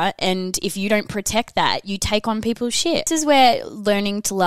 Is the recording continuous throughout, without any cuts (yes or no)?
no